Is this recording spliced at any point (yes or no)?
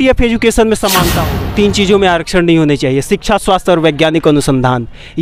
yes